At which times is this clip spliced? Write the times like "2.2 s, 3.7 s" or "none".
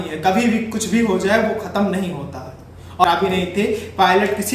3.0 s